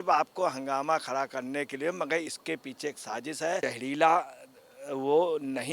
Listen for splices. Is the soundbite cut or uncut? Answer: cut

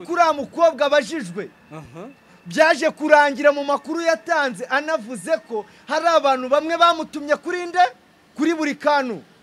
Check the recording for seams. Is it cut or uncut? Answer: uncut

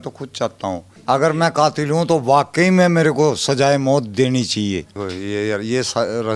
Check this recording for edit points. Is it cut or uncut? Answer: cut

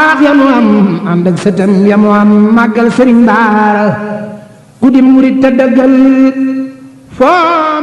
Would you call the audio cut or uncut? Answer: uncut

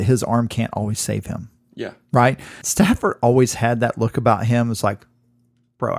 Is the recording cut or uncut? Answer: cut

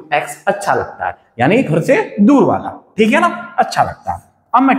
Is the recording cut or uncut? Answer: uncut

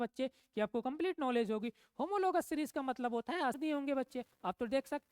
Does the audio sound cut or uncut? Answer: cut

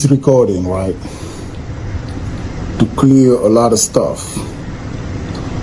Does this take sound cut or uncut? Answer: uncut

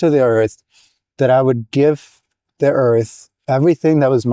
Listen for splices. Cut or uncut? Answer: uncut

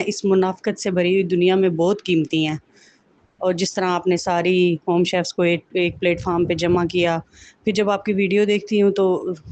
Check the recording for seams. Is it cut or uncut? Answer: uncut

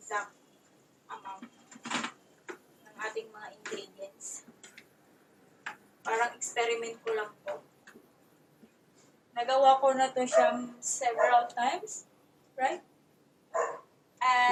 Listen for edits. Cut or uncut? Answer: uncut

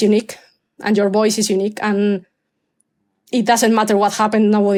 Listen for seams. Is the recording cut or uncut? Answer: uncut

